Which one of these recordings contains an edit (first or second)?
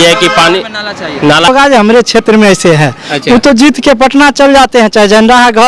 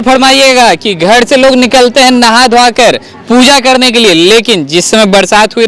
first